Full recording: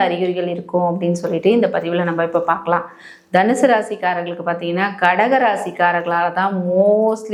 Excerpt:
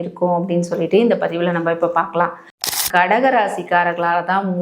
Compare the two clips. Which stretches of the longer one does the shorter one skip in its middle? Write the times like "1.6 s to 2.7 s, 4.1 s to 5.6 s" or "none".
3.3 s to 4.8 s